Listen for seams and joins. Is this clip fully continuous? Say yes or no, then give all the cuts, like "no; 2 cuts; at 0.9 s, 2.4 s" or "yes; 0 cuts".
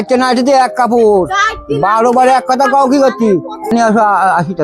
no; 1 cut; at 3.7 s